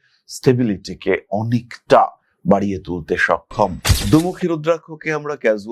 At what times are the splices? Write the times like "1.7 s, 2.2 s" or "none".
3.8 s